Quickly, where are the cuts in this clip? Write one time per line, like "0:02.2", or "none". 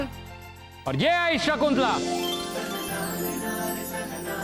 0:02.0